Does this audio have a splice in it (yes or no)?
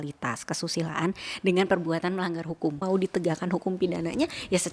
yes